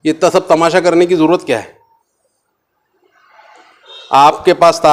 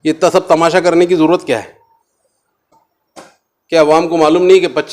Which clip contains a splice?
second; 1 cut; at 2.9 s

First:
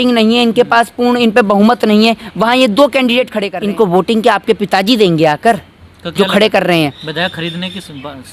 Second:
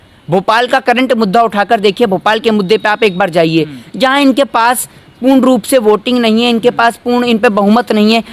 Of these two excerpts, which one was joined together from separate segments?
first; 1 cut; at 3.4 s

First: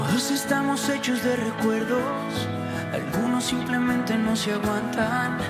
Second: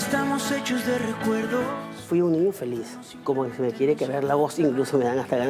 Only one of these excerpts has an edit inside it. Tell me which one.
second; 2 cuts; at 1.9 s, 3.0 s

